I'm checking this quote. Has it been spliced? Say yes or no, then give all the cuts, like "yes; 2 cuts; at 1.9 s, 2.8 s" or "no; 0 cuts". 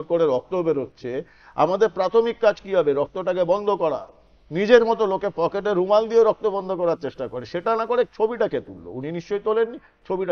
no; 0 cuts